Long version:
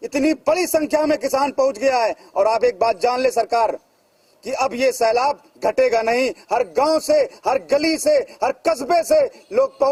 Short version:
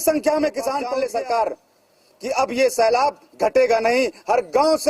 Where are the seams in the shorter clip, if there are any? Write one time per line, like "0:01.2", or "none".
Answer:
0:00.9